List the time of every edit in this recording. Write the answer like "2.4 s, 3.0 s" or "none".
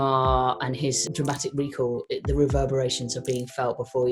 1.0 s

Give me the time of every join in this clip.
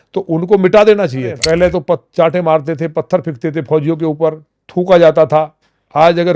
1.4 s

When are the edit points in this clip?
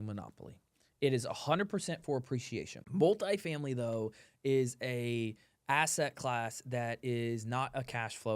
2.7 s

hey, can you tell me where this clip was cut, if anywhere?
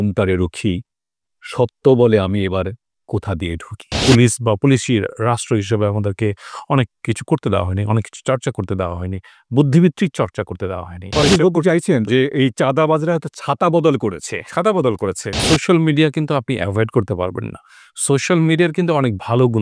4.0 s, 11.1 s, 15.4 s

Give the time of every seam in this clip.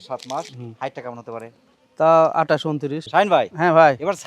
3.0 s

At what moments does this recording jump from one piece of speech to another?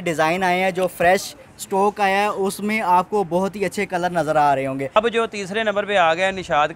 5.0 s

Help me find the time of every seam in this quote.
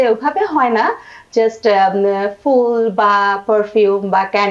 none

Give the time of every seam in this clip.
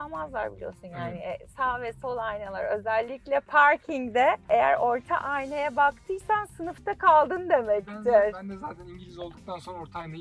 4.5 s

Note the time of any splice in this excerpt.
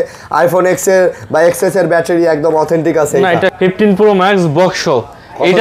3.5 s

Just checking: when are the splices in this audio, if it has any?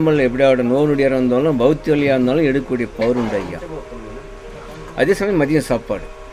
none

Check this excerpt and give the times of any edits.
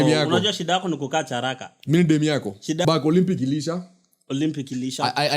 2.8 s

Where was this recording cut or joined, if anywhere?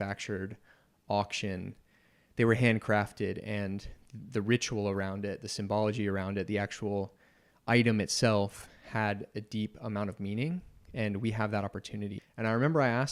12.2 s

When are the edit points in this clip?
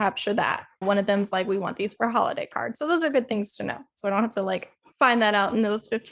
none

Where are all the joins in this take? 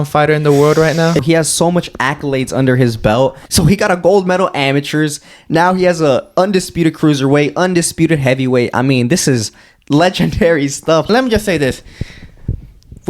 1.2 s, 3.4 s, 11.1 s

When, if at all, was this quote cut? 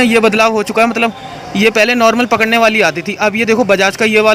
none

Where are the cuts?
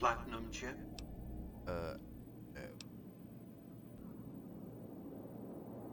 4.0 s

